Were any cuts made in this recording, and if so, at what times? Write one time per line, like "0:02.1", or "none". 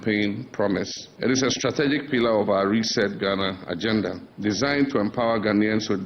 0:01.0
0:04.3